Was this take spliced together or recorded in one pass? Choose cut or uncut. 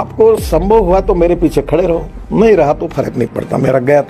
uncut